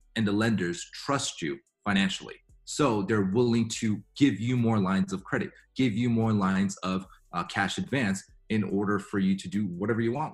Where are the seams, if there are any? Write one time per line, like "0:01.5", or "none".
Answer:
none